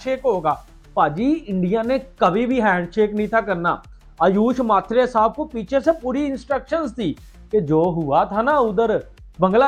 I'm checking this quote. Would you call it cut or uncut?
uncut